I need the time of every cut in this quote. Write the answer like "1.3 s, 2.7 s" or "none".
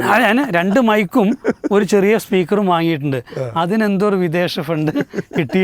none